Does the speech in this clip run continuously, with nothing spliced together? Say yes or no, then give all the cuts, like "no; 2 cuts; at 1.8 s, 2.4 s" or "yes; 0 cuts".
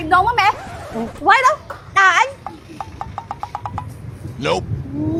yes; 0 cuts